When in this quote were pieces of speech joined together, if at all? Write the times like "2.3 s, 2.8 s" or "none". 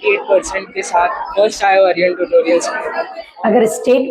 2.8 s